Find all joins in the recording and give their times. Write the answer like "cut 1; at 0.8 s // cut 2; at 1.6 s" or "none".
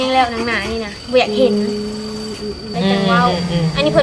cut 1; at 2.7 s